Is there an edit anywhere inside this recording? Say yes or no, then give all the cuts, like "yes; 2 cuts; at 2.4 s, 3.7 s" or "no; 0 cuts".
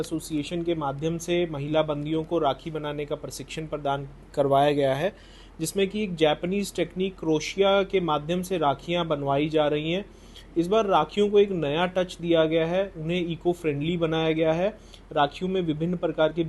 no; 0 cuts